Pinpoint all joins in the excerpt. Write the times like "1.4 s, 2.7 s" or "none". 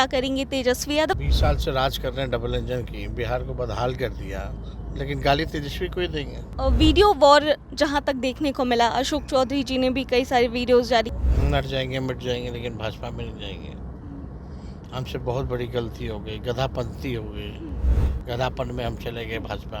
1.2 s, 6.5 s, 11.1 s